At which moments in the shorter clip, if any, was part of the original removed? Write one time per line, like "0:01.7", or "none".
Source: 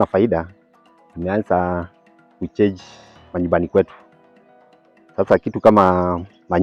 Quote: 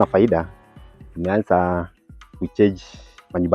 none